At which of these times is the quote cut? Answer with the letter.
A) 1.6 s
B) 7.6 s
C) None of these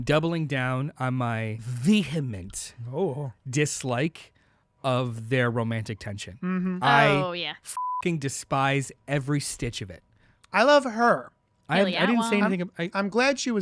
A